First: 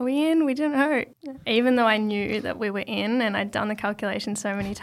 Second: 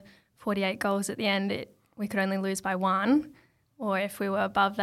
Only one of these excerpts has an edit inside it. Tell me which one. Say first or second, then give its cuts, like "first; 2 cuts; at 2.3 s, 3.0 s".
first; 1 cut; at 1.1 s